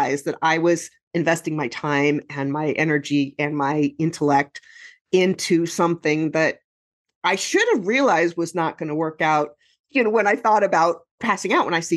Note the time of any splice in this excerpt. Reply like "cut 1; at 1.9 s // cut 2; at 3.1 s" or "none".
cut 1; at 9.9 s // cut 2; at 11.1 s

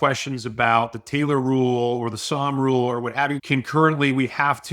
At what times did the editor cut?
cut 1; at 3.4 s

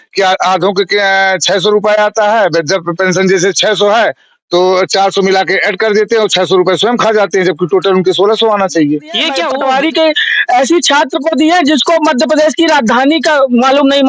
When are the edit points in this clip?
cut 1; at 9.4 s

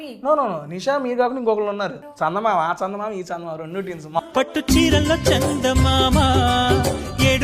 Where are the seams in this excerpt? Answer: cut 1; at 2.0 s // cut 2; at 4.2 s

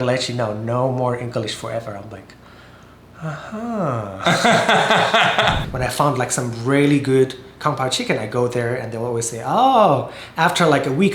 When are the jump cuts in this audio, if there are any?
cut 1; at 5.6 s

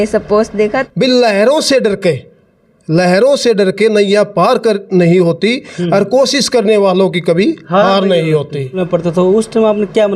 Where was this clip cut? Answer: cut 1; at 0.8 s // cut 2; at 8.8 s

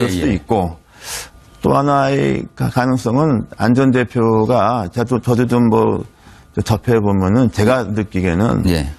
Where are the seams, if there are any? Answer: cut 1; at 4.3 s

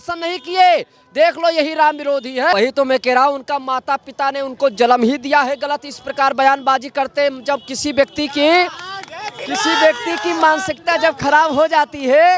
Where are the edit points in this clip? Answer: cut 1; at 2.5 s

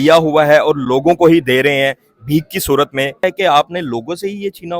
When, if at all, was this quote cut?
cut 1; at 3.2 s

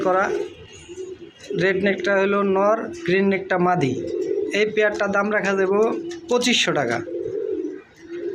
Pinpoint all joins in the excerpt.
none

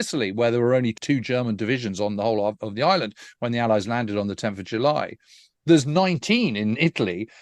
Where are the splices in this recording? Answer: cut 1; at 1.0 s

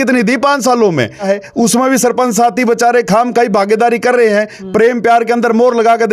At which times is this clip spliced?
cut 1; at 1.2 s

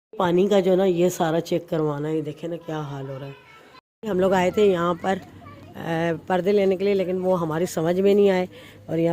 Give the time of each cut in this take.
cut 1; at 3.9 s

